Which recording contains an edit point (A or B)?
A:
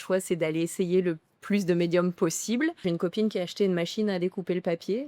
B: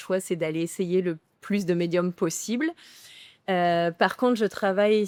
A